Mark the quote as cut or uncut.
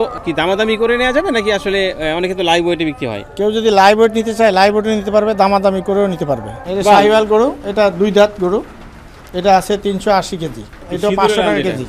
cut